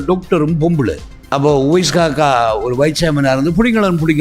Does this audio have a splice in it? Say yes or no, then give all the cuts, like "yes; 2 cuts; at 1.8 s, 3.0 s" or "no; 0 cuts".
yes; 1 cut; at 1.1 s